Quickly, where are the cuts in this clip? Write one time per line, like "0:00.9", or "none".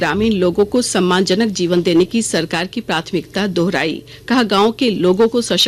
none